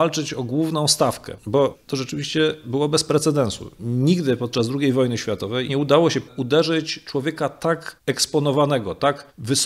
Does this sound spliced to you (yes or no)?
yes